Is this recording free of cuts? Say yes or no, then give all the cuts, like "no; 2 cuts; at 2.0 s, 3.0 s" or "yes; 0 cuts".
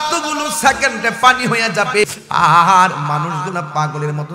no; 1 cut; at 2.1 s